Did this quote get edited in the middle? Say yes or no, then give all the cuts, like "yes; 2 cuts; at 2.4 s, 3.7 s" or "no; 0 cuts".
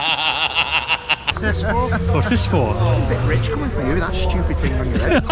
yes; 1 cut; at 1.4 s